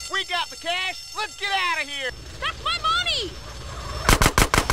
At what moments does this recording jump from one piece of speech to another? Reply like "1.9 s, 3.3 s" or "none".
2.1 s